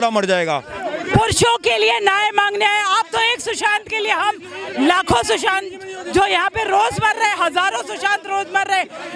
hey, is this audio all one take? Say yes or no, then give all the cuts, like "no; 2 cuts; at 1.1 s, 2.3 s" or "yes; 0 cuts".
no; 1 cut; at 0.9 s